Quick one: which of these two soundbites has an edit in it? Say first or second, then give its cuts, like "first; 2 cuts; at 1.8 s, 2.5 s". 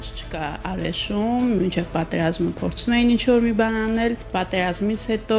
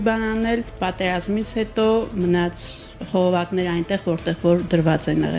first; 1 cut; at 1.6 s